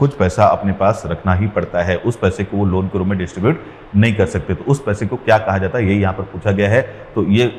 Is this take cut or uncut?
uncut